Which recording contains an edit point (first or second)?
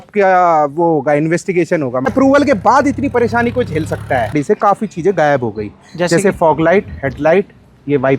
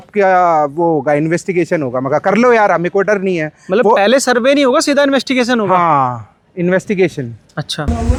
first